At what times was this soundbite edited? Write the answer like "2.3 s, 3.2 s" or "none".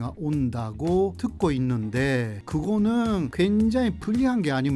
3.3 s